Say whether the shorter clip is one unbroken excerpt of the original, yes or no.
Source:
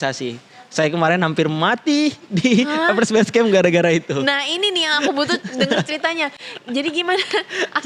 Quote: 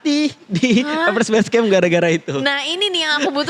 yes